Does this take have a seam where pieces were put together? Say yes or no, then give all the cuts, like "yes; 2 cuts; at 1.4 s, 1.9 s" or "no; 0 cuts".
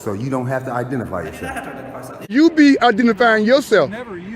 yes; 1 cut; at 2.2 s